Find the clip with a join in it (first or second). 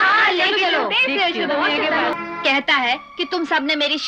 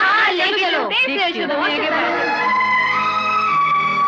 first